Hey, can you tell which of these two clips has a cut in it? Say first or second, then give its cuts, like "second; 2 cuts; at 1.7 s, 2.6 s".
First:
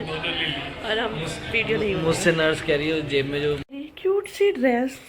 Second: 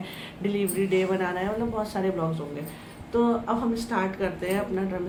first; 1 cut; at 3.6 s